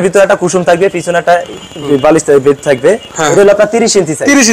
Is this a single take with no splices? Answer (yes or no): no